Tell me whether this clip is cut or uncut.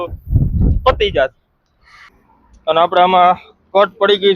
cut